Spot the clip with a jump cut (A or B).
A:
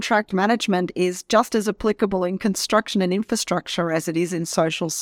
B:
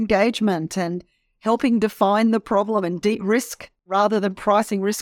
B